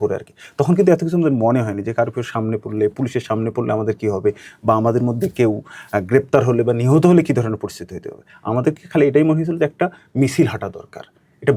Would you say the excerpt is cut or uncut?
uncut